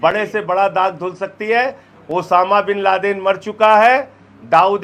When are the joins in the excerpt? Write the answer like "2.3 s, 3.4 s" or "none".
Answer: none